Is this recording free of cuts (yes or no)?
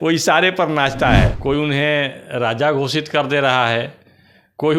no